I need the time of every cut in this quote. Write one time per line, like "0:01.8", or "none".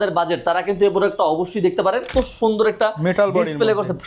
0:02.1